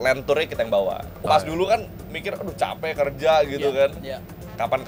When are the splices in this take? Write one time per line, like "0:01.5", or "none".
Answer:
0:01.2